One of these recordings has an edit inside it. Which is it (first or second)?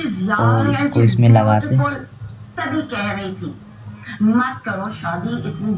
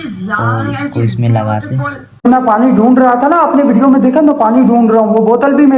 second